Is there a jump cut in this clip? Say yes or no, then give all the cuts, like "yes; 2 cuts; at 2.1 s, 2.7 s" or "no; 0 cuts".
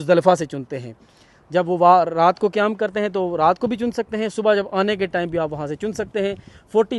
no; 0 cuts